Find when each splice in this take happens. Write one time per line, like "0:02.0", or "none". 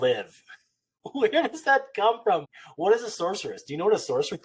0:02.4